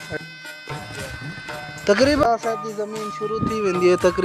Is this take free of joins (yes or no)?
no